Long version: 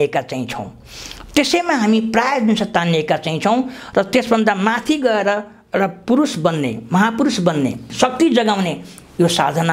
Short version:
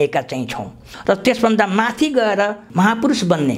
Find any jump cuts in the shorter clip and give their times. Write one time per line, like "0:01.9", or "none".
0:00.9
0:02.6